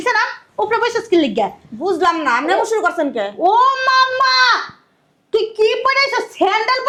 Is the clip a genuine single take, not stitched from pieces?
yes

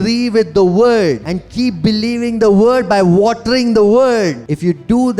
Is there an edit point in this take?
yes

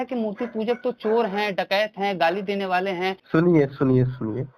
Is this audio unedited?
no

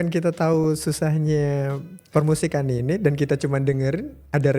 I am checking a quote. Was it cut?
no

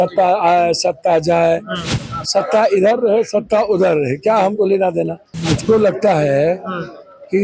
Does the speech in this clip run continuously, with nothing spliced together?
no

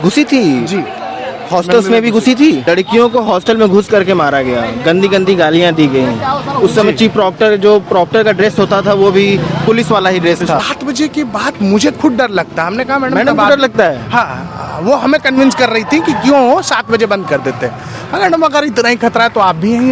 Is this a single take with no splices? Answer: no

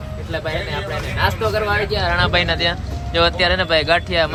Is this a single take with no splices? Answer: yes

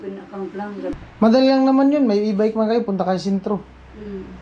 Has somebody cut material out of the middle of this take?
yes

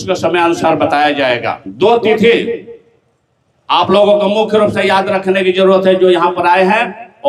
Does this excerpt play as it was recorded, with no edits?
no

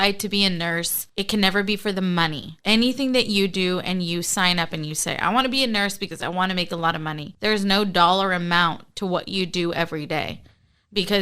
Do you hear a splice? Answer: yes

